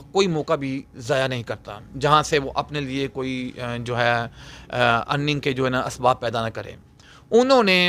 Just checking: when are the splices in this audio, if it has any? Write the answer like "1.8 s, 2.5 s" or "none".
none